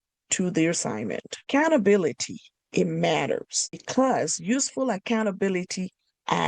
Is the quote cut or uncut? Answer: cut